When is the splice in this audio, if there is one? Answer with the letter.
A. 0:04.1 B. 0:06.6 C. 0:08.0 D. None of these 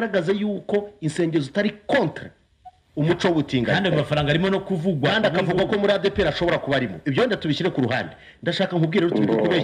D